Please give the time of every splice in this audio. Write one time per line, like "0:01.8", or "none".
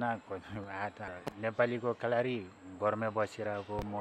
0:01.0